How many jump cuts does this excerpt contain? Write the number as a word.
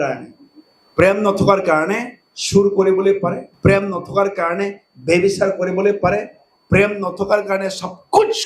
one